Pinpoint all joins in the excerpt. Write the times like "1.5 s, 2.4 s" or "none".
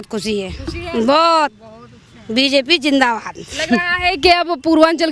none